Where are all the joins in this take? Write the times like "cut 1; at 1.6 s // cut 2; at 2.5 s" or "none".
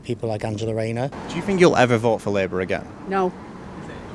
cut 1; at 1.2 s